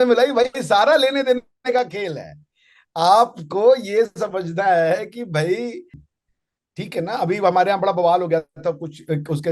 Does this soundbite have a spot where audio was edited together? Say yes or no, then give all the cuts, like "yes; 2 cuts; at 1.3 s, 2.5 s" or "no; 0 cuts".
yes; 1 cut; at 6.0 s